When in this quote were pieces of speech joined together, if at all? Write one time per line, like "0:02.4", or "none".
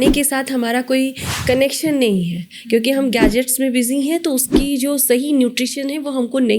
none

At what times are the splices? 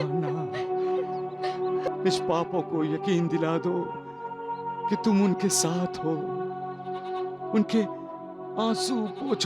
0:01.9

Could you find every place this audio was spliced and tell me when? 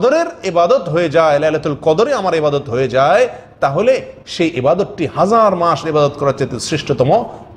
none

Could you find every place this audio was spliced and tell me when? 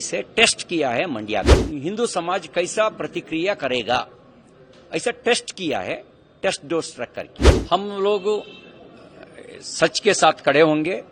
0:01.6
0:07.5

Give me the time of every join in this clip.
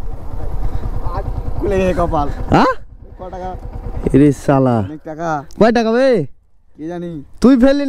none

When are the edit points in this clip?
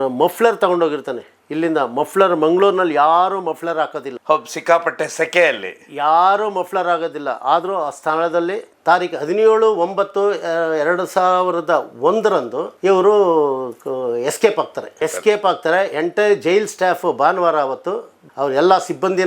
0:08.7

